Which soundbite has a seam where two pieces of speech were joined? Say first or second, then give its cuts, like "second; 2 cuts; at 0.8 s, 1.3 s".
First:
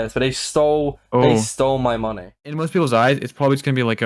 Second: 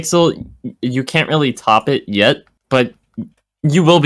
first; 1 cut; at 2.6 s